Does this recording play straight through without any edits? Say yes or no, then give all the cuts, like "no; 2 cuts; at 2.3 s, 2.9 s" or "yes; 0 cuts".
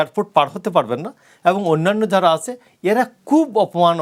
yes; 0 cuts